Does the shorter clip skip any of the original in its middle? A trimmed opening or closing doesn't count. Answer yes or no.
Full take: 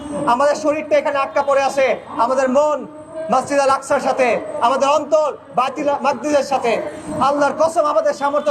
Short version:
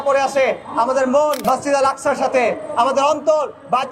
yes